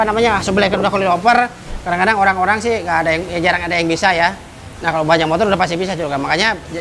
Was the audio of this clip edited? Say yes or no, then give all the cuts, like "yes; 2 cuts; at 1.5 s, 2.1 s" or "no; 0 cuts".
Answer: no; 0 cuts